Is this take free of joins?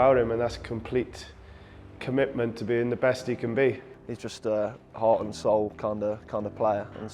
no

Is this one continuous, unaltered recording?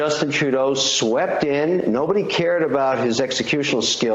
yes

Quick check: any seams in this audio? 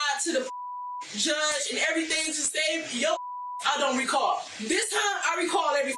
yes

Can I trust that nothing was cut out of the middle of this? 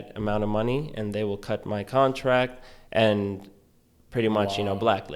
yes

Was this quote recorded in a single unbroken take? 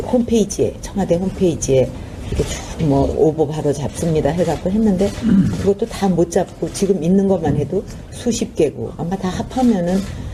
yes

